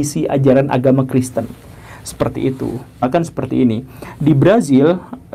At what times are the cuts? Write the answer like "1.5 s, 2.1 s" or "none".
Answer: 3.0 s